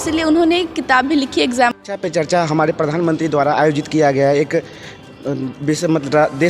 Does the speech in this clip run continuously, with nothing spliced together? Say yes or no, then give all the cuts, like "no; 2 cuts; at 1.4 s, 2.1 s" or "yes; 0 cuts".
no; 1 cut; at 1.7 s